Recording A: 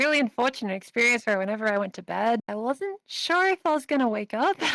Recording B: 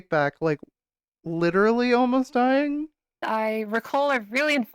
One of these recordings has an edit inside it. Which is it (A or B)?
B